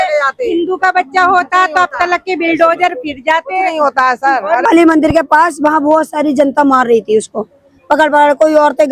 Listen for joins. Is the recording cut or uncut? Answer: cut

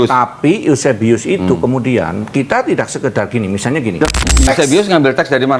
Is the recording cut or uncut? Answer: cut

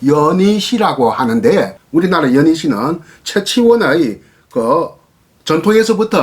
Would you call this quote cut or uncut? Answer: cut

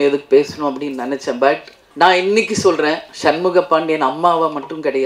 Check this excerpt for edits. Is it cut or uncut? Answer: cut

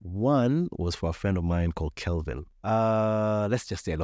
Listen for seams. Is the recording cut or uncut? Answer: cut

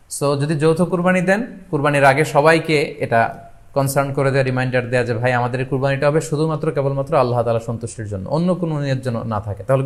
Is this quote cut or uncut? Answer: uncut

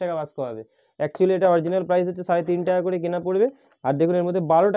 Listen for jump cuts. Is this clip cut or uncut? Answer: uncut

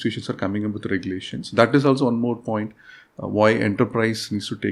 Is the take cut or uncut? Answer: uncut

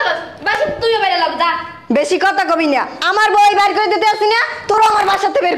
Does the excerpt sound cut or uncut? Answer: uncut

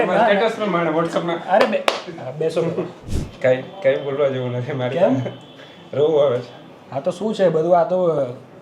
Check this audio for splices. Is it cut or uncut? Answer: cut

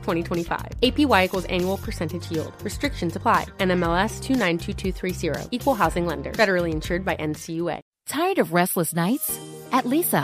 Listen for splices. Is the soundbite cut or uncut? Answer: cut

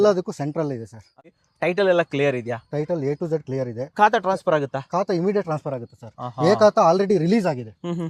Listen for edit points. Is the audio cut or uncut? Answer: cut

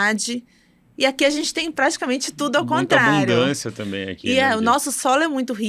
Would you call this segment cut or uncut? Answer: uncut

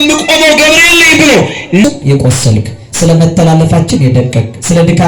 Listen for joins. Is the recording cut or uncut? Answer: cut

